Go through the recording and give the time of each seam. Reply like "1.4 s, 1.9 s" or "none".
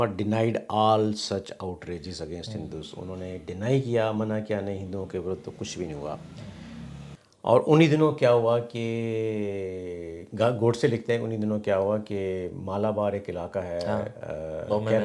7.2 s